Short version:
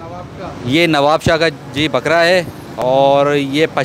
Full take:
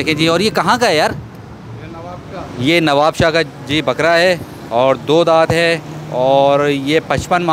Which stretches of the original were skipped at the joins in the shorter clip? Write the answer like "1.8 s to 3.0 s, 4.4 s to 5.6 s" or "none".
4.6 s to 6.0 s